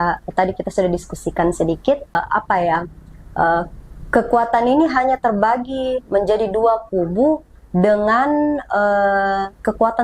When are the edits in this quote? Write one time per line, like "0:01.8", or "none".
0:02.2